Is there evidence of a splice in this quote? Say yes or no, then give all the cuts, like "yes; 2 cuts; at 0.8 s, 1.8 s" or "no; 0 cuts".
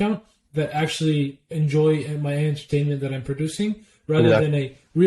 no; 0 cuts